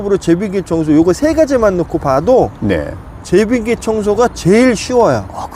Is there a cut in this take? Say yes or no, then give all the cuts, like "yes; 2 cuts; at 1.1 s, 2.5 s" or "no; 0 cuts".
no; 0 cuts